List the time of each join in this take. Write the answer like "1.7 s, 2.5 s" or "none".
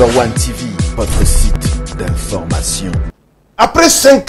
3.0 s